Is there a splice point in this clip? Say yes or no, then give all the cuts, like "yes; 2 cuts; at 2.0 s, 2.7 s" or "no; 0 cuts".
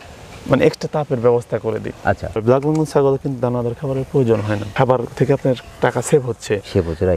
yes; 1 cut; at 2.3 s